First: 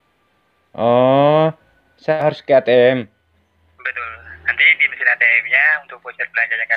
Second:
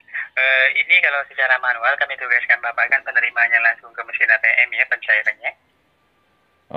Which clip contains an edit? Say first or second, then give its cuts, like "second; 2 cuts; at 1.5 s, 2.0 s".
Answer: first; 1 cut; at 2.1 s